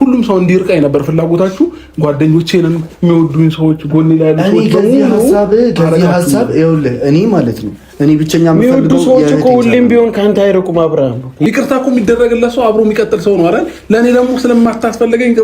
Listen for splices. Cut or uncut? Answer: cut